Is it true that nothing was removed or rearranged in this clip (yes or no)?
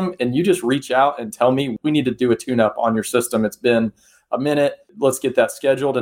no